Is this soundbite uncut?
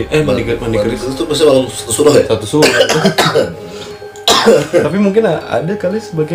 yes; 0 cuts

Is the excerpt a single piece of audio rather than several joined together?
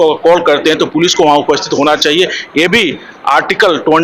yes; 0 cuts

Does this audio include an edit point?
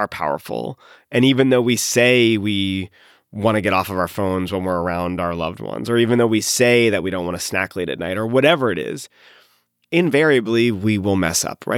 yes; 1 cut; at 9.9 s

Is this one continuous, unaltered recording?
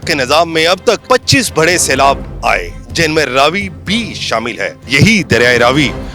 no; 2 cuts; at 1.0 s, 4.9 s

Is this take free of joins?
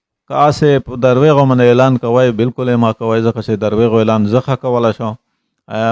yes; 0 cuts

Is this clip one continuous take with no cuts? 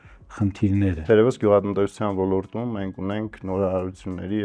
no; 1 cut; at 1.0 s

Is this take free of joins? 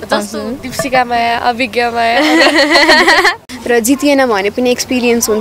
no; 1 cut; at 3.5 s

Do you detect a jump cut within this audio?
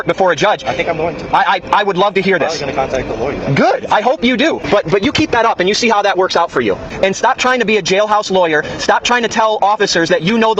yes; 2 cuts; at 4.6 s, 6.9 s

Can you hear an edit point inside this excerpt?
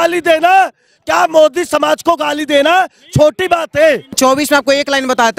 yes; 1 cut; at 4.2 s

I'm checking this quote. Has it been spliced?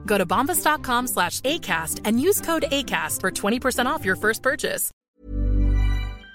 yes; 1 cut; at 4.9 s

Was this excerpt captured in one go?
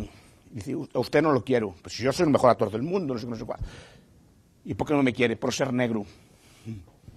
yes; 0 cuts

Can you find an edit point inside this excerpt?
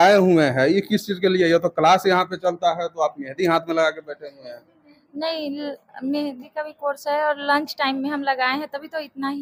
no; 0 cuts

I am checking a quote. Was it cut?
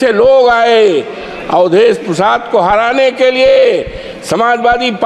no; 0 cuts

